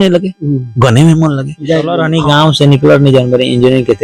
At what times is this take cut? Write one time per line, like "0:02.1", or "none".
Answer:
0:02.0